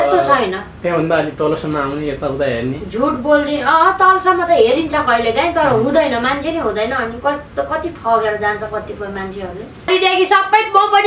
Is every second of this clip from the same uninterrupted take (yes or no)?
no